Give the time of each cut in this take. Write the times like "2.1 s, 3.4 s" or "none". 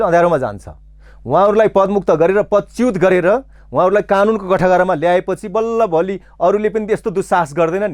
none